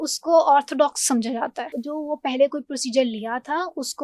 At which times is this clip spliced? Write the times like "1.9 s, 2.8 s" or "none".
1.8 s